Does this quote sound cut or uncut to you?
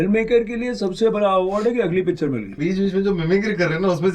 cut